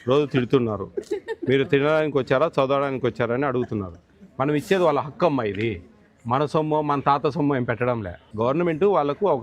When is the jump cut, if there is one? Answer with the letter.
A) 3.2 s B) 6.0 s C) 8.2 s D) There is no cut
C